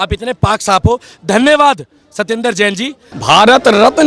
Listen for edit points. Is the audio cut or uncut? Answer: cut